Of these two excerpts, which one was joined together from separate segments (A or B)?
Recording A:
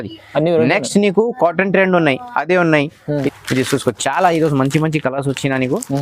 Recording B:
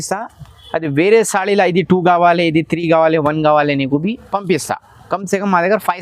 A